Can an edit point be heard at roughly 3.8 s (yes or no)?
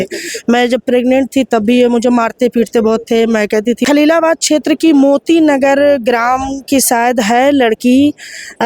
yes